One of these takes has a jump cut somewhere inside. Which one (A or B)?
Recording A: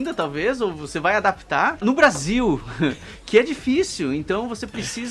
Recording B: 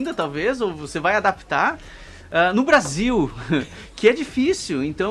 A